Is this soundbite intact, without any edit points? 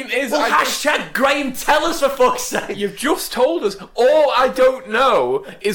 yes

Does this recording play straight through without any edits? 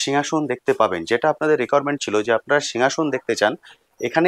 yes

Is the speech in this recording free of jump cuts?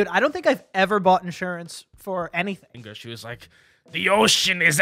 no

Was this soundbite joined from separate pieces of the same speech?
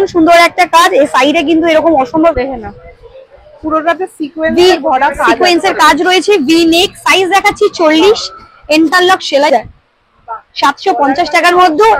yes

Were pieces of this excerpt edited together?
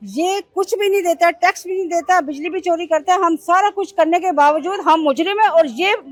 no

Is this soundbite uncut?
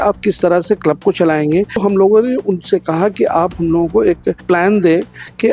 no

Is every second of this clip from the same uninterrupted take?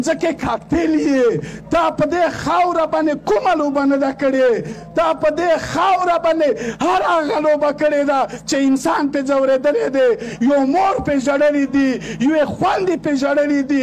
yes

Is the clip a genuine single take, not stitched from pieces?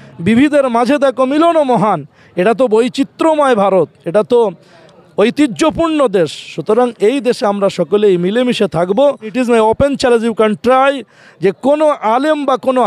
no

